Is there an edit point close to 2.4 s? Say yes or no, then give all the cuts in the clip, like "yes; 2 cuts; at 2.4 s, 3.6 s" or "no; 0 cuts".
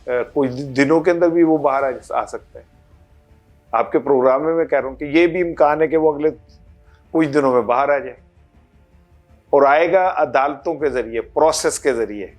no; 0 cuts